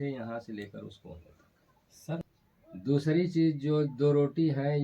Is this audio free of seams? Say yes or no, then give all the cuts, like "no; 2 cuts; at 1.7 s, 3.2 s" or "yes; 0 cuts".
no; 1 cut; at 2.2 s